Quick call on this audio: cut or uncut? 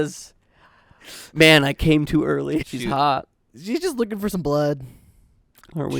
cut